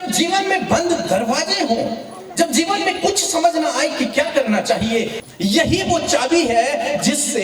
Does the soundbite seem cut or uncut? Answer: cut